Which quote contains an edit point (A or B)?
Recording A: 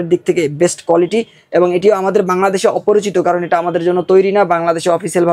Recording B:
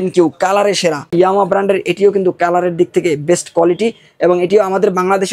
B